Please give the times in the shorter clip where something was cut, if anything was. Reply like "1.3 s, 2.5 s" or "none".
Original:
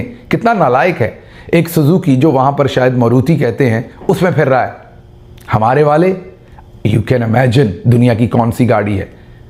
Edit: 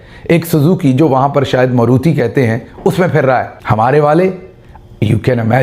3.6 s